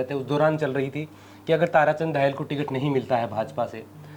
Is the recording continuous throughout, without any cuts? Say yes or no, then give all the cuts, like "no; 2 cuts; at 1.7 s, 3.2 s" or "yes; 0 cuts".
yes; 0 cuts